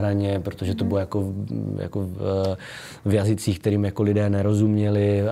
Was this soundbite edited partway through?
no; 0 cuts

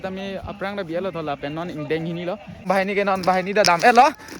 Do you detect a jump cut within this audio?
yes; 1 cut; at 2.7 s

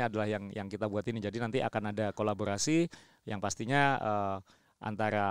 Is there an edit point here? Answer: no; 0 cuts

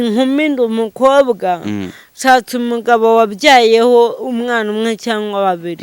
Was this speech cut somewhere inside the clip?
no; 0 cuts

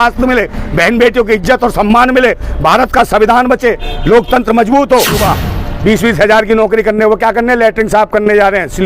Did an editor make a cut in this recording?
yes; 1 cut; at 5.2 s

